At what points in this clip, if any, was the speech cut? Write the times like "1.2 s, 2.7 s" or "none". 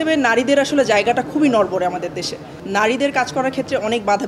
2.5 s